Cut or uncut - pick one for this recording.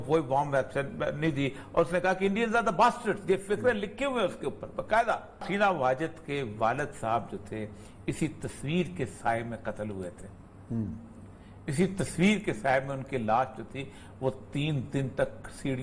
cut